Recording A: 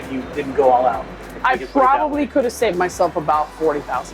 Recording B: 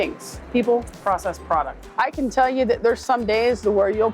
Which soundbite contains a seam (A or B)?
B